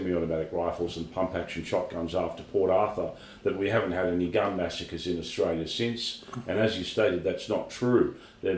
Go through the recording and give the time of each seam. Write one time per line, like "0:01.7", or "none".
none